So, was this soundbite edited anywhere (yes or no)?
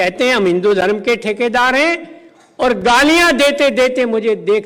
no